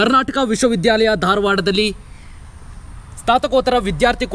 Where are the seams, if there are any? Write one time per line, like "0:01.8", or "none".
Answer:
none